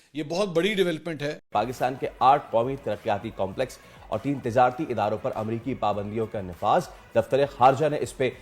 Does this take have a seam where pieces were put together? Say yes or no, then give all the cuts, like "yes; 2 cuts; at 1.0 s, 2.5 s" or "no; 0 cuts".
yes; 1 cut; at 1.3 s